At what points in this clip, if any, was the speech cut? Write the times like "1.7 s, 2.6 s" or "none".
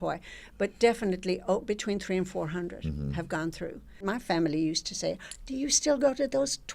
4.0 s